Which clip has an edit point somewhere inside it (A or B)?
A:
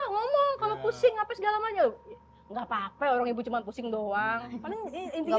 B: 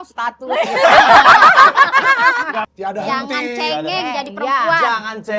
B